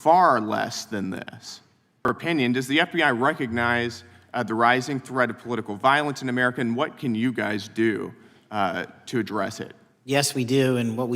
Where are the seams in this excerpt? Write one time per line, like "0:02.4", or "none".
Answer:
0:02.1